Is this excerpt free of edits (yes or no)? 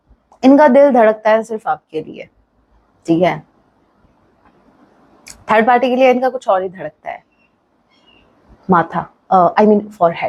yes